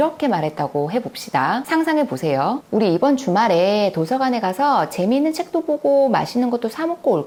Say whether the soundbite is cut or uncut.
uncut